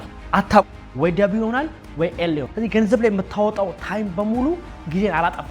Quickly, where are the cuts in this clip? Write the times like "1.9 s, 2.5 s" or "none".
2.5 s